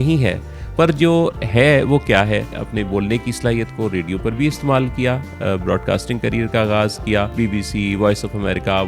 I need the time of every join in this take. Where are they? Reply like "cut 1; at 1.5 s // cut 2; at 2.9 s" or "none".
cut 1; at 2.6 s // cut 2; at 7.3 s